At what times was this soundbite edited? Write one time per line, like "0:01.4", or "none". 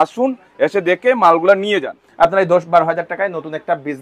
0:02.0